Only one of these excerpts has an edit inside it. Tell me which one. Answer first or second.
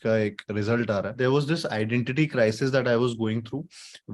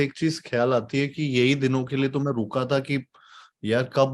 first